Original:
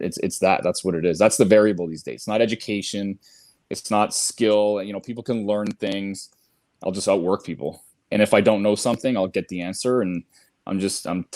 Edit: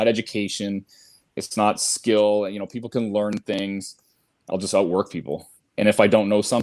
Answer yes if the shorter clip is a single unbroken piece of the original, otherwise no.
yes